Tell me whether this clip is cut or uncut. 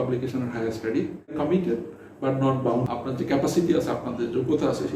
cut